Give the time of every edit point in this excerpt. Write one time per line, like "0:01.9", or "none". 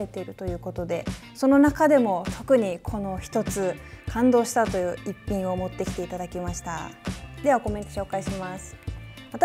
none